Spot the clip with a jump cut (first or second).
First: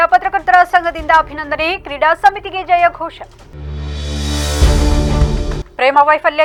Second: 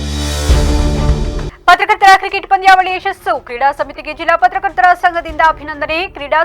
second